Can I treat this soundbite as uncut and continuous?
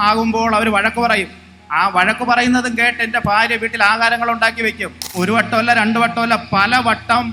no; 1 cut; at 5.1 s

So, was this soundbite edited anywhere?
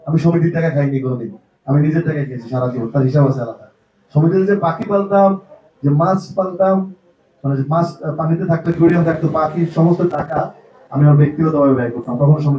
no; 0 cuts

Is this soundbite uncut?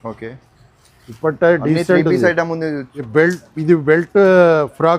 no; 1 cut; at 2.9 s

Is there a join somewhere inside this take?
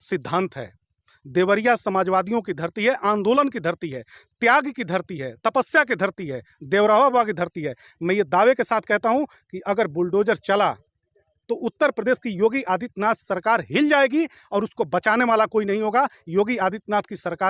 no; 0 cuts

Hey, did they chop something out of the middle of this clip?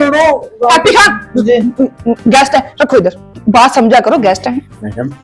yes; 1 cut; at 3.3 s

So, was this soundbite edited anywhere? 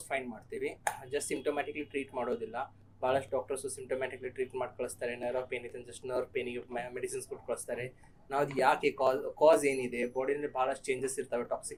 no; 0 cuts

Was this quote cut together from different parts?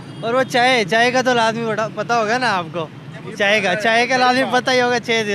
no; 0 cuts

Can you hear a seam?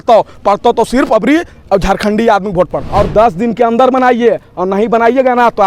yes; 1 cut; at 2.8 s

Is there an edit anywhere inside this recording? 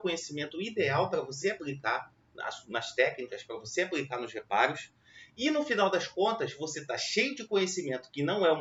no; 0 cuts

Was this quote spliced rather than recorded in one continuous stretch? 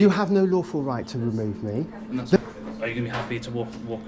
yes; 1 cut; at 2.4 s

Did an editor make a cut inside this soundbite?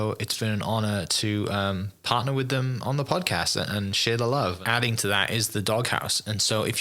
yes; 1 cut; at 4.6 s

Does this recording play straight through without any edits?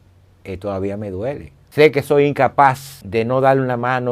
no; 2 cuts; at 1.6 s, 2.9 s

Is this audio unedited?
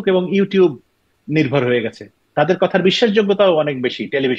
no; 1 cut; at 2.2 s

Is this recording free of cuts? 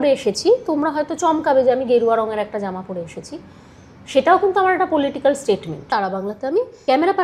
no; 1 cut; at 5.8 s

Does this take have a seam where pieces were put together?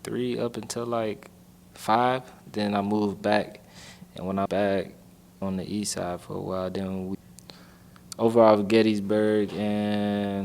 yes; 3 cuts; at 4.5 s, 5.4 s, 7.2 s

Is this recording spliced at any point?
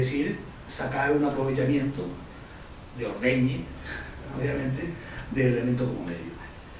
no; 0 cuts

